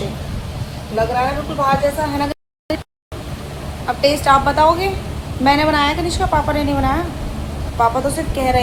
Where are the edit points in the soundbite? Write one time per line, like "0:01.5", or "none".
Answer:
none